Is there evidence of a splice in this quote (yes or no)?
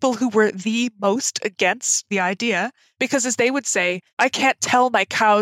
yes